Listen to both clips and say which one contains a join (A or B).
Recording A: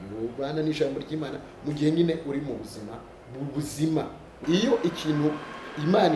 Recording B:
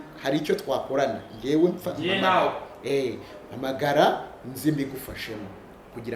A